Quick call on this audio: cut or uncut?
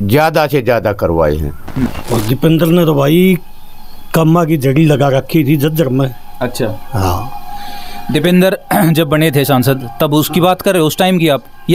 cut